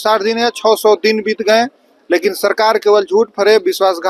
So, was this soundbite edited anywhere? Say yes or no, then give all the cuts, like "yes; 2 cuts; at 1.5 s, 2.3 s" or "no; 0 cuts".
no; 0 cuts